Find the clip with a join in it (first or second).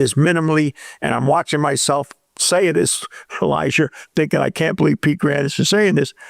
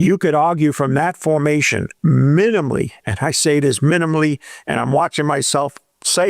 second